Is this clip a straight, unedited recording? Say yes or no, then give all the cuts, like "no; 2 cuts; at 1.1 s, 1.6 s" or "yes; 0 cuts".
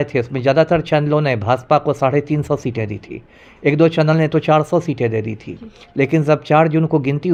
yes; 0 cuts